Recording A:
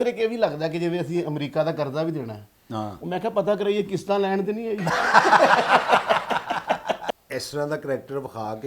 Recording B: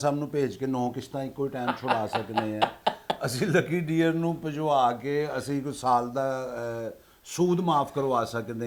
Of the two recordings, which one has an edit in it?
A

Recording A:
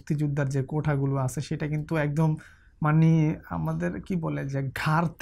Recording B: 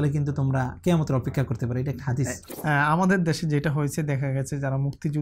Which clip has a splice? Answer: B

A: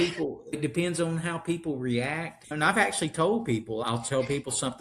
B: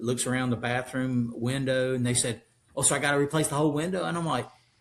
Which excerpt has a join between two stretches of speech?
A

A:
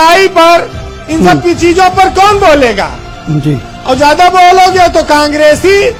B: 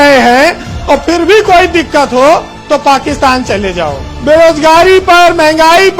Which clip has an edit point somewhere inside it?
B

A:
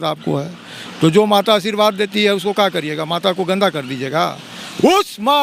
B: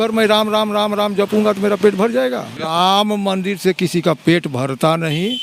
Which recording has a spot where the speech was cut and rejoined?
B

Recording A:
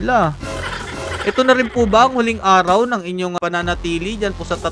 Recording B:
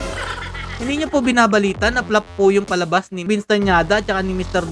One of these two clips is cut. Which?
A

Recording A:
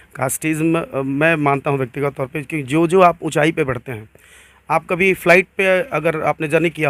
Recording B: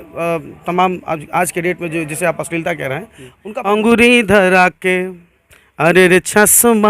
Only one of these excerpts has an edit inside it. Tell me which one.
B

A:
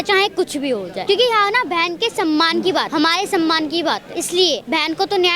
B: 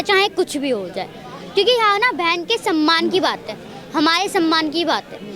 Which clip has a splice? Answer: A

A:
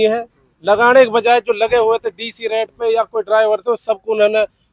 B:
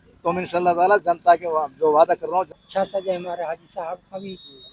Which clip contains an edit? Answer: B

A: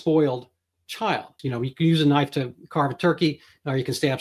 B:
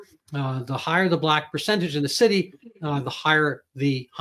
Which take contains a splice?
A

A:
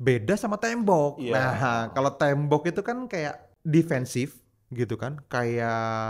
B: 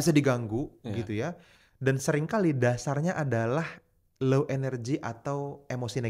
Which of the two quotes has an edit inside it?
A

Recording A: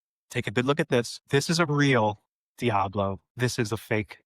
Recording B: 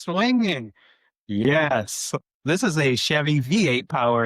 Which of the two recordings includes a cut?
A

